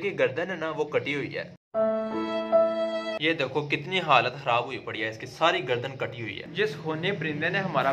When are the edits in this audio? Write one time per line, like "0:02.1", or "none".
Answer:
none